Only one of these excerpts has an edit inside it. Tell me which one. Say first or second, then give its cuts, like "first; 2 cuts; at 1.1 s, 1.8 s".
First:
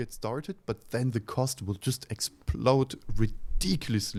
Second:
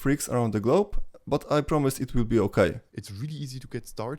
second; 1 cut; at 2.8 s